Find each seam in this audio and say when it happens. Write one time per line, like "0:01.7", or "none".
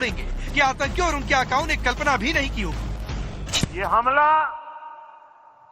0:02.0

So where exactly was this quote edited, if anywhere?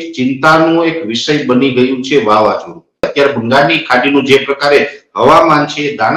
0:03.1

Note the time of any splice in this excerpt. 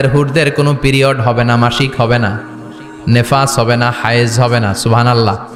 none

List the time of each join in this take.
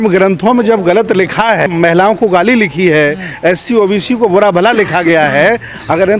0:01.7

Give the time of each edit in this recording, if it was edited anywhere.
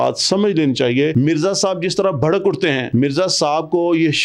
0:01.1
0:02.8

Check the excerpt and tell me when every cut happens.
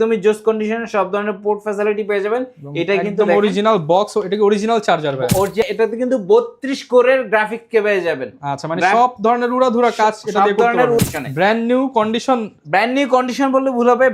0:05.7
0:11.0

